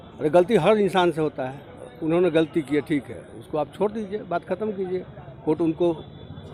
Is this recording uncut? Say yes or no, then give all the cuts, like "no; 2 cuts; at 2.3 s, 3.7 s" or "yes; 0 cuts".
yes; 0 cuts